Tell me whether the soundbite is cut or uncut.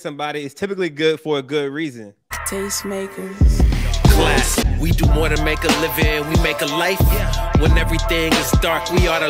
cut